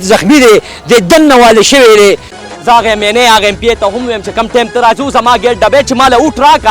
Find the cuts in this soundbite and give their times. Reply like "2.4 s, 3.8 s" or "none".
2.3 s